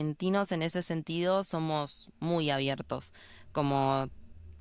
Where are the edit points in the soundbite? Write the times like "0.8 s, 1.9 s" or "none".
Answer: none